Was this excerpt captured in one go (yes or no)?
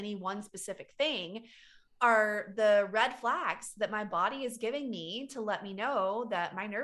yes